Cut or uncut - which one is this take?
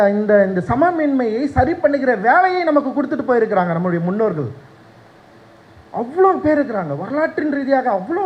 uncut